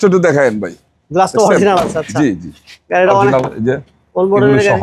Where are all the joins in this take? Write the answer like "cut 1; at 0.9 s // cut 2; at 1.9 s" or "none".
none